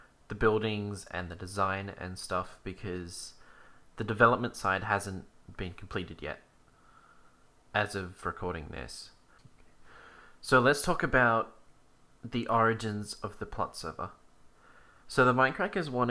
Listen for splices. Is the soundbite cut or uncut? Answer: cut